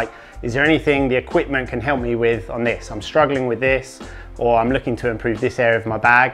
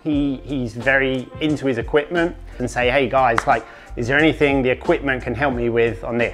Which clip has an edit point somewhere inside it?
second; 1 cut; at 2.6 s

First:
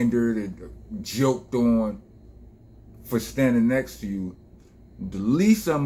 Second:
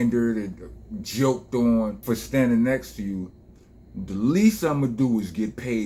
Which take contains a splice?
second; 1 cut; at 2.0 s

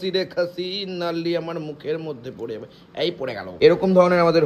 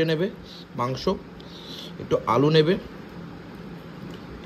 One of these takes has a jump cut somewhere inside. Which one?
first; 1 cut; at 3.5 s

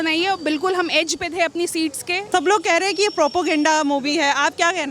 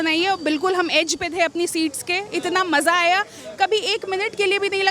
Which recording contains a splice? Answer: first; 1 cut; at 2.3 s

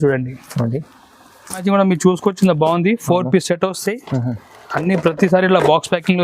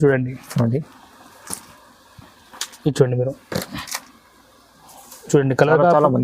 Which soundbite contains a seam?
first; 1 cut; at 1.6 s

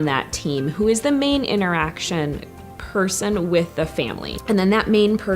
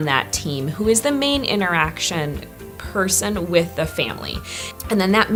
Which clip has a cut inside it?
first; 1 cut; at 4.3 s

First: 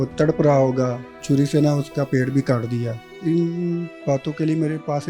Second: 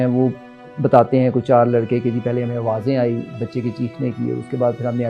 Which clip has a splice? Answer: first; 2 cuts; at 1.2 s, 3.0 s

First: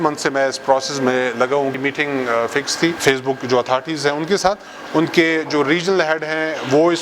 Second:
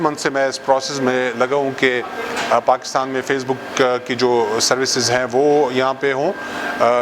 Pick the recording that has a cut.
first; 2 cuts; at 1.7 s, 3.0 s

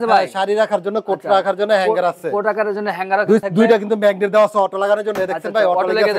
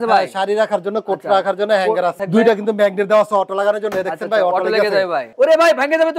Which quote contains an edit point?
second; 2 cuts; at 2.2 s, 5.3 s

